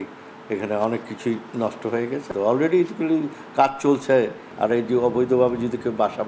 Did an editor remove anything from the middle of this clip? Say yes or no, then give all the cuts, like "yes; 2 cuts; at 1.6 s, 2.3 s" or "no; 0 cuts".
yes; 1 cut; at 2.3 s